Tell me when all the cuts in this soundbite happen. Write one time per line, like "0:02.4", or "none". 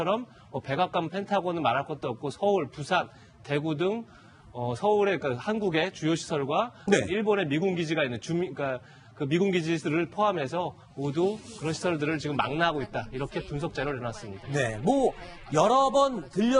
0:04.0